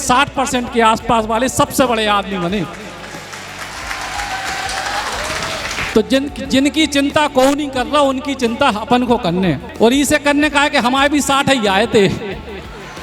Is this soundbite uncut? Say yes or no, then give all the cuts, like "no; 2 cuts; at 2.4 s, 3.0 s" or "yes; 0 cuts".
no; 1 cut; at 9.7 s